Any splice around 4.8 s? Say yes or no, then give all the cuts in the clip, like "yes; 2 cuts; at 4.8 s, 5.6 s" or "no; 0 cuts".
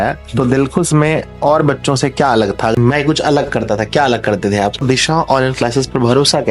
yes; 2 cuts; at 2.7 s, 4.8 s